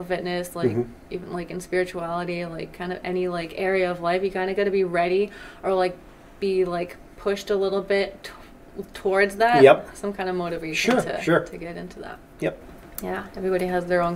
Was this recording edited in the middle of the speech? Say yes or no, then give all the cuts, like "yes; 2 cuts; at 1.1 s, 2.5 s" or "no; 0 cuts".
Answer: no; 0 cuts